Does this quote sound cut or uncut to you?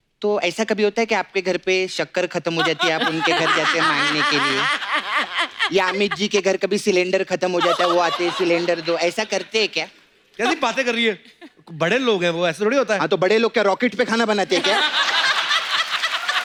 uncut